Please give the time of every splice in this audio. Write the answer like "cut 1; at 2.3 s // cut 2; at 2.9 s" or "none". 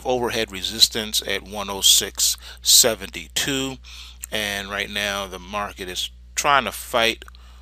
cut 1; at 5.4 s